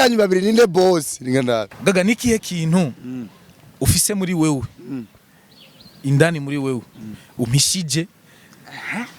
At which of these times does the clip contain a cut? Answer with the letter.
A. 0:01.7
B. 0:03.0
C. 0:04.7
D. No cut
A